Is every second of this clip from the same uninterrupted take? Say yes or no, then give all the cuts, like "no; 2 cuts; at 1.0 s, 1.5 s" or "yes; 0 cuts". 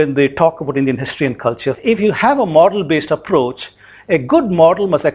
no; 1 cut; at 1.7 s